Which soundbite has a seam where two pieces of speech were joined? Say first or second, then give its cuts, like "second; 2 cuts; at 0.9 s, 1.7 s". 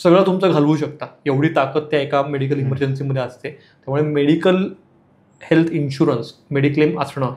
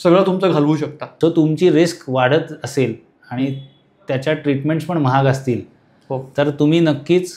second; 1 cut; at 1.0 s